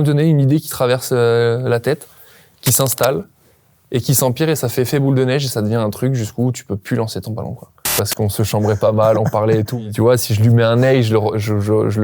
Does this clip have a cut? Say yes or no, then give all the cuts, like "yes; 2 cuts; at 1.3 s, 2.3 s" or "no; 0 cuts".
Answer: yes; 2 cuts; at 7.9 s, 9.8 s